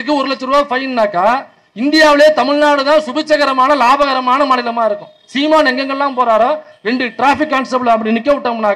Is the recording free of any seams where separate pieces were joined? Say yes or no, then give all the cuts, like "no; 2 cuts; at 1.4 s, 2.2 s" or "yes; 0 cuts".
yes; 0 cuts